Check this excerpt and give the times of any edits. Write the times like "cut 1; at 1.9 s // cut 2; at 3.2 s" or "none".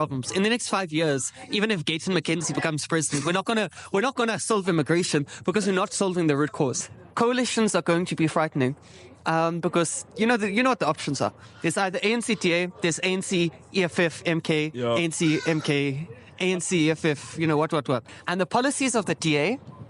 cut 1; at 6.8 s // cut 2; at 18.1 s